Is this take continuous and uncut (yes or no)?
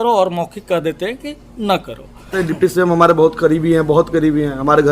no